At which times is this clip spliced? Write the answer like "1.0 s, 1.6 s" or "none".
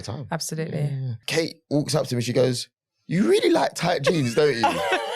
1.2 s